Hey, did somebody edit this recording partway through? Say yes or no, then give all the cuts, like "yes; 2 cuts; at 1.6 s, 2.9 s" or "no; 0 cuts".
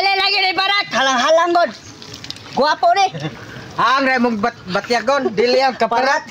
no; 0 cuts